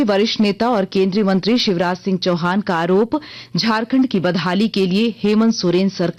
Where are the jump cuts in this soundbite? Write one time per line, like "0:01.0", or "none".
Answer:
none